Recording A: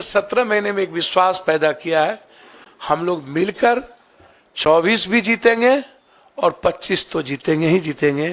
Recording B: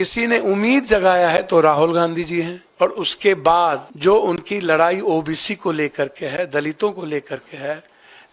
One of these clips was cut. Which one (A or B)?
B